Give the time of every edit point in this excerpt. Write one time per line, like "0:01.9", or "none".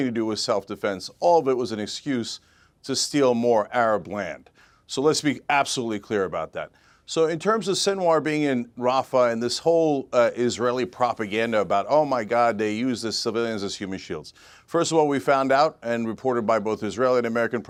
none

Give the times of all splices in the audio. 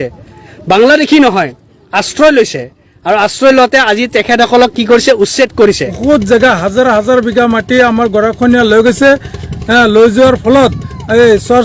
0:05.9

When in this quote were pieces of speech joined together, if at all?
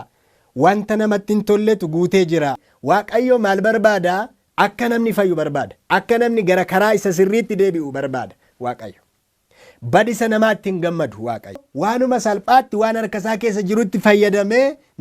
0:02.7
0:11.7

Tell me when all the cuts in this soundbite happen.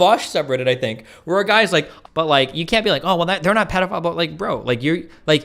0:01.9

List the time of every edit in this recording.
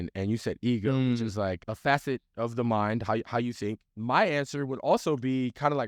0:01.7
0:03.9

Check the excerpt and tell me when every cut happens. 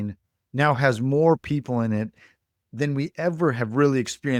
none

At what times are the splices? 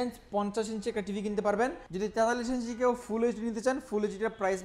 0:01.8

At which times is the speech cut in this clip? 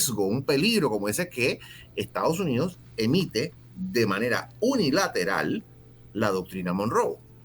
none

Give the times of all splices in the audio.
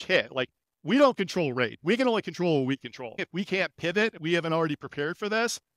0:03.2

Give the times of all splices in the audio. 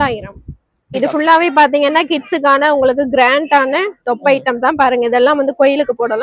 0:01.0

